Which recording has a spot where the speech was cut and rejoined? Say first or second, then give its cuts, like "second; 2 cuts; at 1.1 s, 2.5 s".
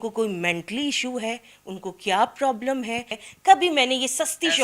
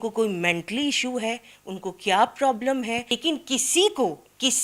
first; 1 cut; at 3.1 s